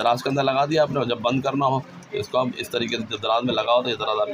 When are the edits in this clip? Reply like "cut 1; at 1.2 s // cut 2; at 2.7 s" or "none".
none